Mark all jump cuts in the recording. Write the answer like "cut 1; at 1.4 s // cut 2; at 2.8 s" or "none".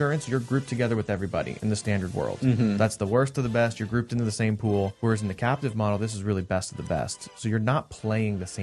cut 1; at 4.9 s